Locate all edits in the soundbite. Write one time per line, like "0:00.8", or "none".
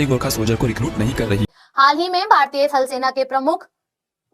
0:01.5